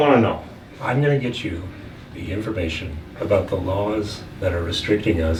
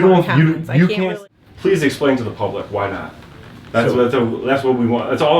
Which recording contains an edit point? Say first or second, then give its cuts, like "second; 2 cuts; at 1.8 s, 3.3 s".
second; 1 cut; at 1.0 s